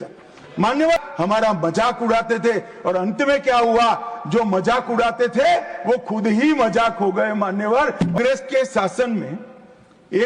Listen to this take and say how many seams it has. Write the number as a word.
two